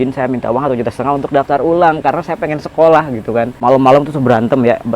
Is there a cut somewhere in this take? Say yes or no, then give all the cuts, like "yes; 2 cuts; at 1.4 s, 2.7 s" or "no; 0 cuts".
yes; 1 cut; at 3.5 s